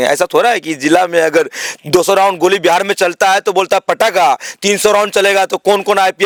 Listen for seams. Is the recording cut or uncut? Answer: uncut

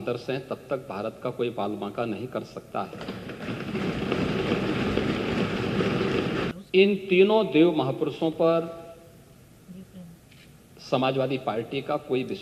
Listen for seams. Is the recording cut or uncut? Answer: cut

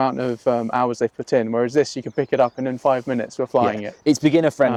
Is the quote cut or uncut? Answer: uncut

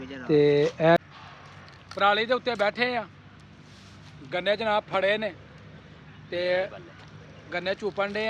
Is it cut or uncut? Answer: cut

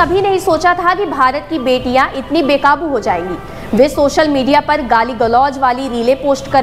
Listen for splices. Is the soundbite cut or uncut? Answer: uncut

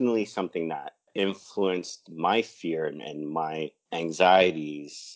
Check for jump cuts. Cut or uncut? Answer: cut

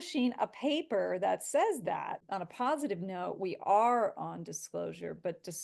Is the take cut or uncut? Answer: cut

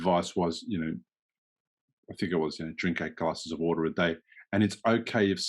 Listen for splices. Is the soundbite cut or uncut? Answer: uncut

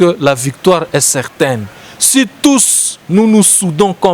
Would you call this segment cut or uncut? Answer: uncut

